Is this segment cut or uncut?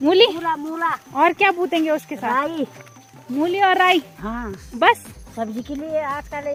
uncut